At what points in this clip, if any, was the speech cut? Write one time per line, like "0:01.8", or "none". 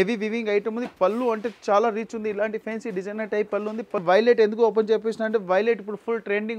0:04.0